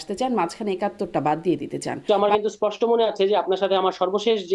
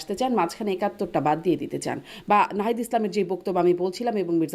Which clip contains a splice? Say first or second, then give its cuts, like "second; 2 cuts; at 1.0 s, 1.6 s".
first; 1 cut; at 2.0 s